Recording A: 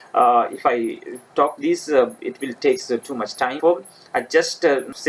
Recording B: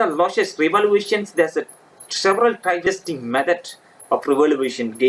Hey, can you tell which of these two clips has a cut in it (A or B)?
A